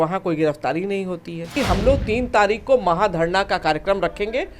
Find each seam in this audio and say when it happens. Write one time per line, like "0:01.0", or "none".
0:01.6